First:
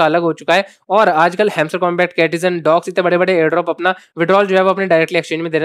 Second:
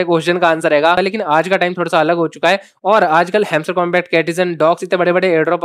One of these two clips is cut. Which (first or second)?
second